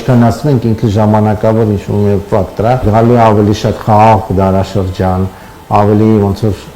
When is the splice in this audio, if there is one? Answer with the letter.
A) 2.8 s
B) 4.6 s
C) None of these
A